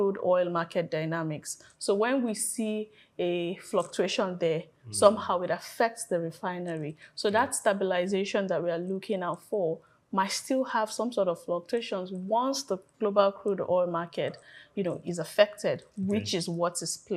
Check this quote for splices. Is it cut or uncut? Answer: uncut